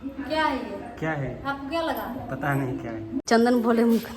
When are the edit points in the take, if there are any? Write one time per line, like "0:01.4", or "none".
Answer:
0:03.2

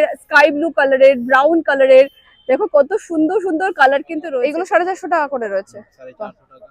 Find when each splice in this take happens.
0:04.2

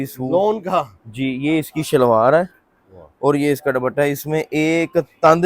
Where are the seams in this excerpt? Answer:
none

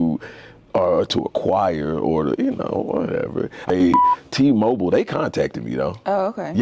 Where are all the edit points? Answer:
0:03.8

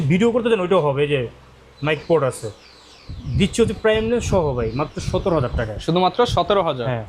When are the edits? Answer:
none

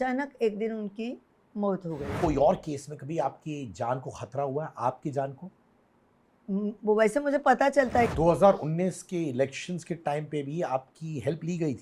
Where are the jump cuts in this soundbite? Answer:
0:02.1
0:08.1

